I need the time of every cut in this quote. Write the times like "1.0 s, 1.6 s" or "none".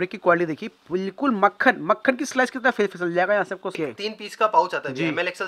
3.7 s